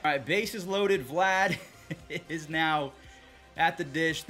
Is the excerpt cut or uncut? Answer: uncut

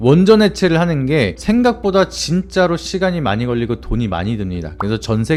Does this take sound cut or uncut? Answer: uncut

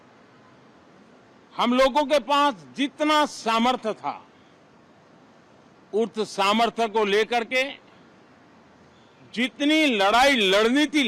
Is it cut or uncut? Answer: uncut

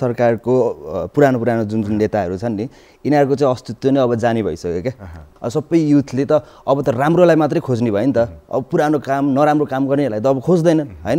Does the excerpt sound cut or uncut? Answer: cut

